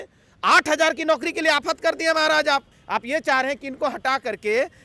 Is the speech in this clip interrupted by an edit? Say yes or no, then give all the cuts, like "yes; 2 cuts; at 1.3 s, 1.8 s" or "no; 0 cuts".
yes; 1 cut; at 2.8 s